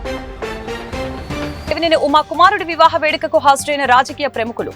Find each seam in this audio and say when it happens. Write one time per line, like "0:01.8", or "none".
0:01.6